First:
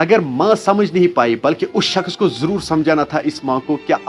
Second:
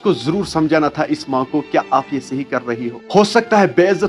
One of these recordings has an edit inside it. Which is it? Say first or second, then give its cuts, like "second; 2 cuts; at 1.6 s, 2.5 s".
second; 1 cut; at 3.0 s